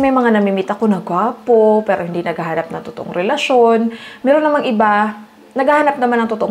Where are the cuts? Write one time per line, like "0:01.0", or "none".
none